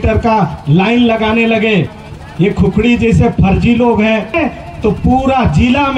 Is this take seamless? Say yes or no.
no